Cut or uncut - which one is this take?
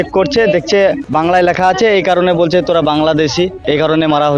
cut